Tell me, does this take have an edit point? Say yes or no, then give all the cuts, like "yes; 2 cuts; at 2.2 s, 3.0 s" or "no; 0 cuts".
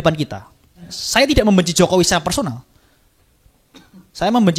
yes; 1 cut; at 1.0 s